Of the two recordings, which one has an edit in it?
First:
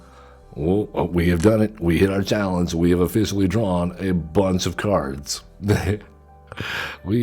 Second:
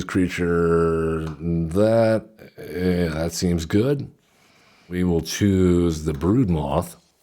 second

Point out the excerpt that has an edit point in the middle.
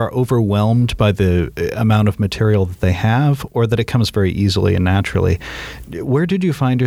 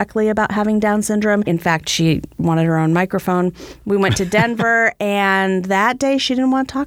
second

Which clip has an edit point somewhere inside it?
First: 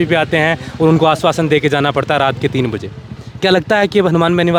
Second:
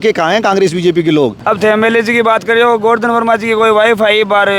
second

